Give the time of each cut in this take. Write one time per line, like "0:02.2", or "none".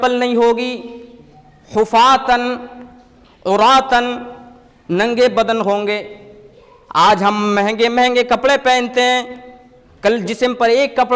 none